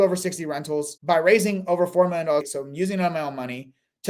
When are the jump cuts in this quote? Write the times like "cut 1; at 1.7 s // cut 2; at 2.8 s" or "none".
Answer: cut 1; at 0.9 s // cut 2; at 2.5 s